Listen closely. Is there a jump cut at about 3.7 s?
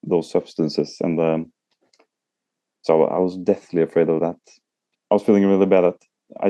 no; 1 cut; at 4.9 s

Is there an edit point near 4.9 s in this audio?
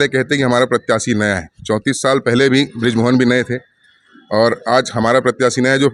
no; 0 cuts

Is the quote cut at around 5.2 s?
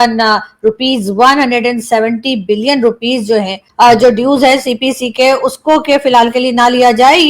no; 1 cut; at 3.6 s

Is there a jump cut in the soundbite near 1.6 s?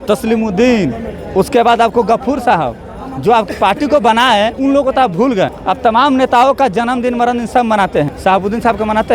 no; 3 cuts; at 3.5 s, 5.6 s, 8.1 s

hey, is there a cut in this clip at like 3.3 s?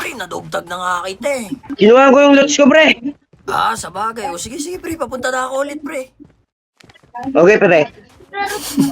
no; 1 cut; at 1.7 s

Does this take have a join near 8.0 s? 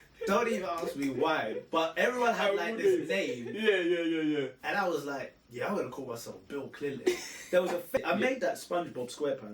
yes; 1 cut; at 8.0 s

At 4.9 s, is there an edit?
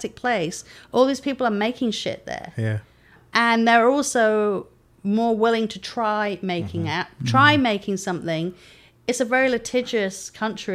no; 1 cut; at 3.2 s

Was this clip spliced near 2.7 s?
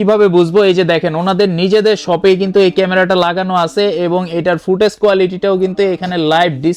no; 0 cuts

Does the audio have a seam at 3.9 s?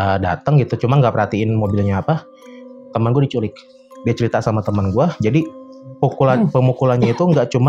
yes; 1 cut; at 3.9 s

